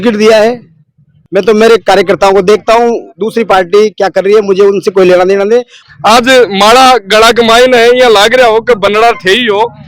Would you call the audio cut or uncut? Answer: cut